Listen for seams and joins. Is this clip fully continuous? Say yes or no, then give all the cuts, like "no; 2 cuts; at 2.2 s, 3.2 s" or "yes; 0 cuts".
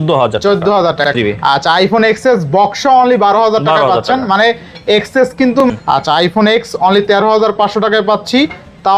no; 2 cuts; at 1.1 s, 5.6 s